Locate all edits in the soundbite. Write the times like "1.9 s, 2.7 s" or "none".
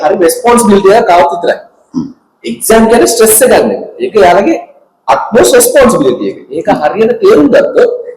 none